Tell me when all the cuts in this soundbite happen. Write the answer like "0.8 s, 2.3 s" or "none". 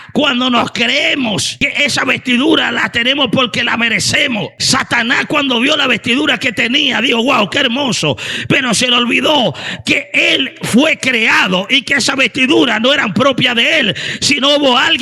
1.6 s, 4.6 s